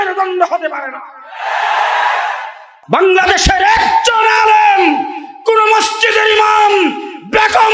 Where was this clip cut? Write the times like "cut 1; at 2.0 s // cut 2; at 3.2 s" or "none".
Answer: cut 1; at 2.7 s